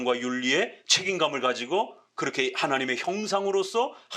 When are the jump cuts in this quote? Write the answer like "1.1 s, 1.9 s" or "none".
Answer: none